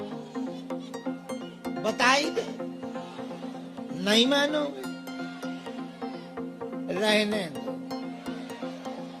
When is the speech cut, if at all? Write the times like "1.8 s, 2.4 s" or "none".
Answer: none

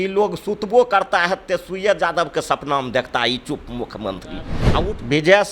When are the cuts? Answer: 4.6 s

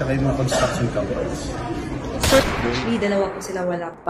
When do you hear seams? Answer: 2.8 s

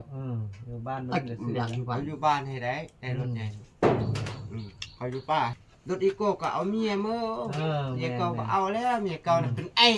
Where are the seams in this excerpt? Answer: 5.7 s

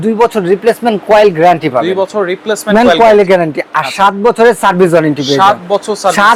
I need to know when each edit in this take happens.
none

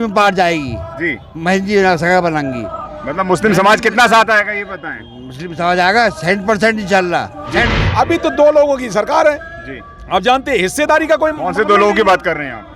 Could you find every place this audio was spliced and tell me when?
7.8 s

